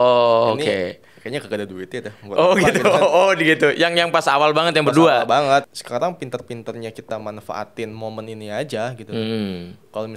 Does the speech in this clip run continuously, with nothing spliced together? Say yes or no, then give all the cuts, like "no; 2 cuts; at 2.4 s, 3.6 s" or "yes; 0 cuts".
no; 1 cut; at 5.6 s